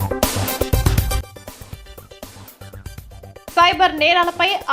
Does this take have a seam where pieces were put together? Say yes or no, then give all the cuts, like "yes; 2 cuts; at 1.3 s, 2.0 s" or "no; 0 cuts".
yes; 2 cuts; at 1.2 s, 2.4 s